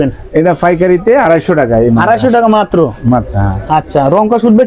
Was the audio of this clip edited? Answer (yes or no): no